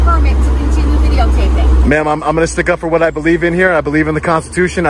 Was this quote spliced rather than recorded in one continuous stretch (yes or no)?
no